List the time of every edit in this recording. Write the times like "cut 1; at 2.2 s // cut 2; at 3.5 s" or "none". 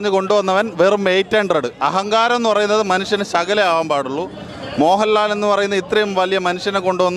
none